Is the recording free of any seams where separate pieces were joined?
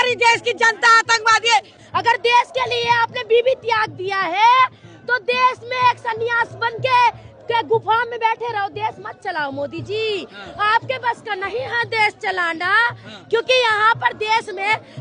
no; 1 cut; at 1.8 s

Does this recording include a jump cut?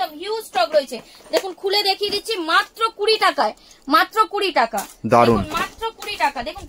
no; 0 cuts

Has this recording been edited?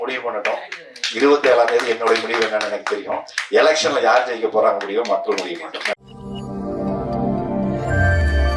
yes; 1 cut; at 5.9 s

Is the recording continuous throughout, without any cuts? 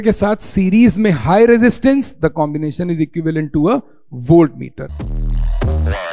no; 1 cut; at 5.0 s

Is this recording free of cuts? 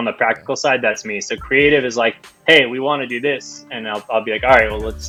yes; 0 cuts

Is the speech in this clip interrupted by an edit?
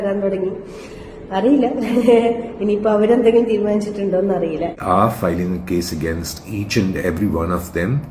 yes; 1 cut; at 4.8 s

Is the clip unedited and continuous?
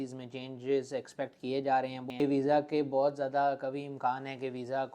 no; 1 cut; at 2.0 s

